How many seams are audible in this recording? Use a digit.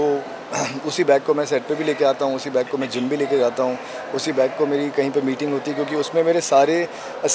0